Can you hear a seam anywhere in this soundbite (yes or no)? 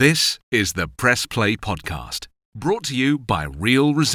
no